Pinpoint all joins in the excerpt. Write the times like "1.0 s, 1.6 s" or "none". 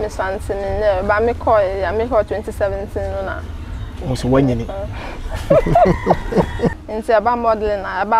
6.8 s